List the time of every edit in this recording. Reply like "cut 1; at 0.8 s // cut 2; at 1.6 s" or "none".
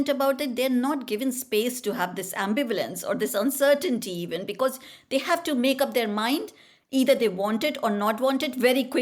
none